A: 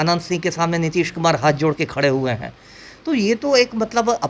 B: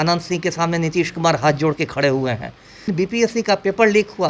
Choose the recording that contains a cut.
B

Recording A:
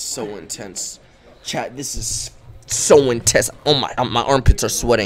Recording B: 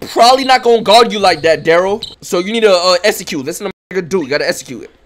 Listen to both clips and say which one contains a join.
B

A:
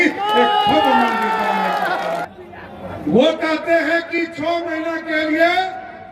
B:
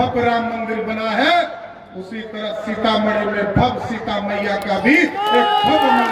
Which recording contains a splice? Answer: A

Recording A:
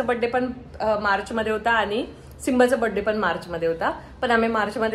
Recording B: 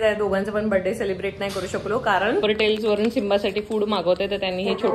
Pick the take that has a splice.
B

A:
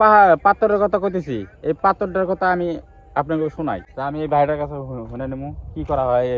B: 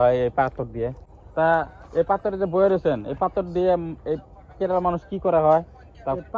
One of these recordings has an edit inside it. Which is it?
A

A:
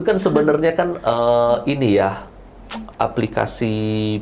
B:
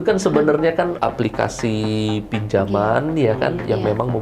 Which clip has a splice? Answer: B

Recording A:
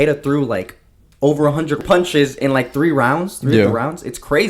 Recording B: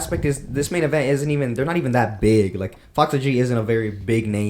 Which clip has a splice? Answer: A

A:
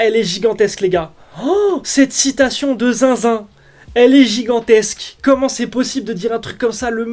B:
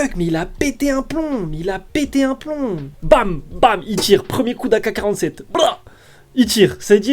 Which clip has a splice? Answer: B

